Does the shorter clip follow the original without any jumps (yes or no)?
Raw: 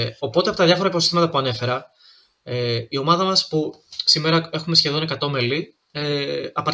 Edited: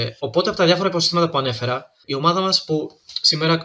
no